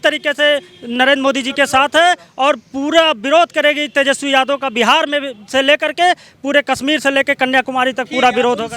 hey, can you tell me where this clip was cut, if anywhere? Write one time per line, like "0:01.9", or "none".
none